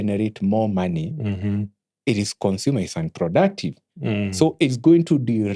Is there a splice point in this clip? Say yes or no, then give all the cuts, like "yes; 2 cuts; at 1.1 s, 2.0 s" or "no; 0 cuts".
no; 0 cuts